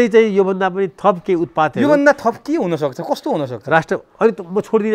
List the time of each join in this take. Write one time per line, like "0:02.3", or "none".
none